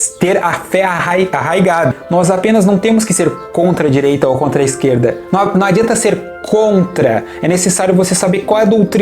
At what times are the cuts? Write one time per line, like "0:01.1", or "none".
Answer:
0:01.9